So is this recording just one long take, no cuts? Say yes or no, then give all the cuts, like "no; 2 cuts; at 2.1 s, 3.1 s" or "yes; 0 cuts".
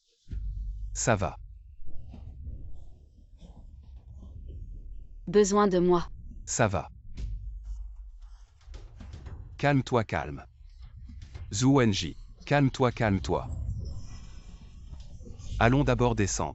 yes; 0 cuts